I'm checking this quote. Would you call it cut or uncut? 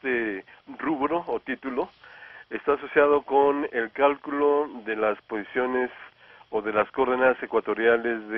cut